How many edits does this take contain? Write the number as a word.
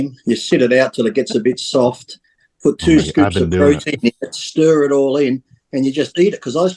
zero